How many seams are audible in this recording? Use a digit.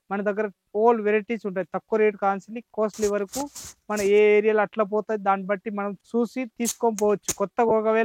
1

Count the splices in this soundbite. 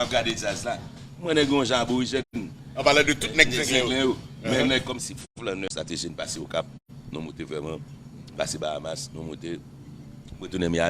2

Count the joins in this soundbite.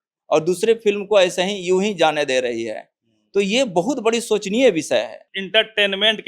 1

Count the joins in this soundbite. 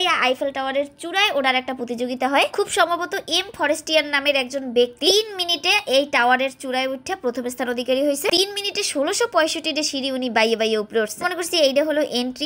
0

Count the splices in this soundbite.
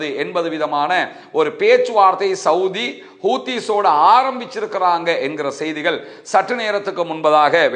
0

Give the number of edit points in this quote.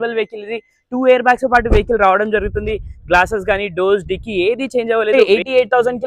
1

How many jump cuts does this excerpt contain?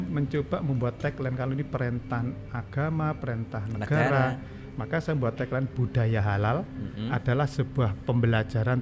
0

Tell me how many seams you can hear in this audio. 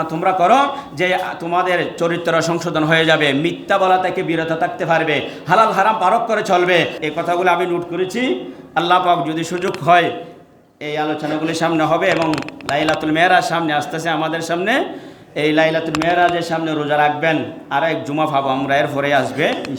1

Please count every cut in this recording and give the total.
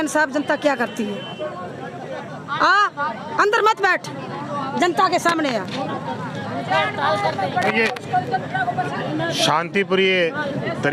0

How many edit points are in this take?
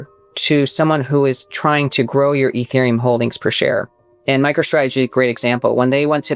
0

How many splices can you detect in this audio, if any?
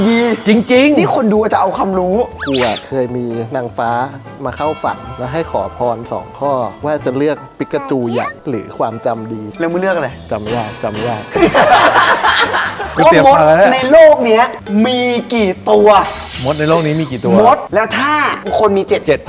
3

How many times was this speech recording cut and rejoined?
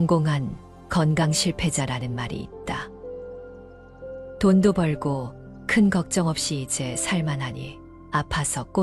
2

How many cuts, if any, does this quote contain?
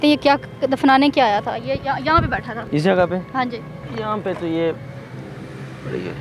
2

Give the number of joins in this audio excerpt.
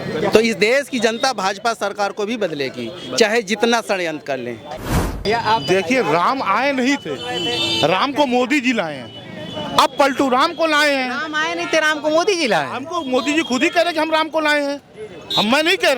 1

